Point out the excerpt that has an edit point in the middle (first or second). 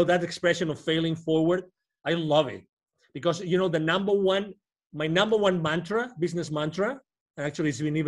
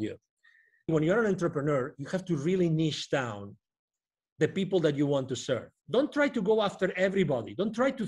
second